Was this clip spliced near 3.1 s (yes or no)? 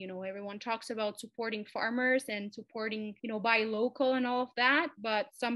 yes